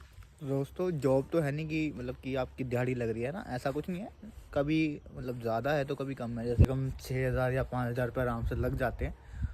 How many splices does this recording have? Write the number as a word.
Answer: one